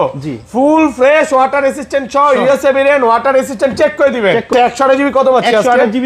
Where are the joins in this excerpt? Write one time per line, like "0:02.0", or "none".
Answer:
0:04.5